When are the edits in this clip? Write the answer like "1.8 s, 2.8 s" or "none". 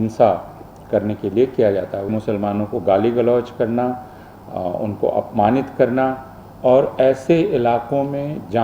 2.1 s